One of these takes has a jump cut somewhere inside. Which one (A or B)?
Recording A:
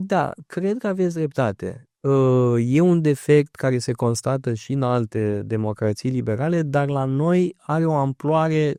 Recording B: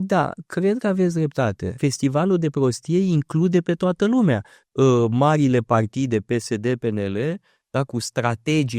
B